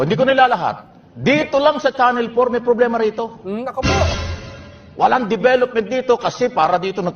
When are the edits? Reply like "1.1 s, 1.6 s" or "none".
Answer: 3.2 s